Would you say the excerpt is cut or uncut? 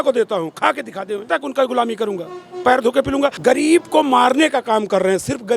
cut